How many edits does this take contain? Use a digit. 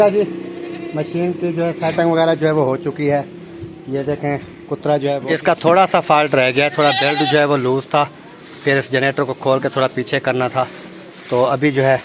0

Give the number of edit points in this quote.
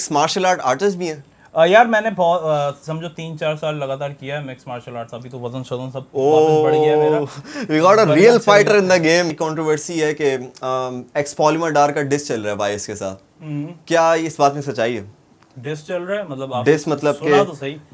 1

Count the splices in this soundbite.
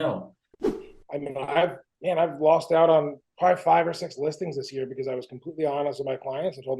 3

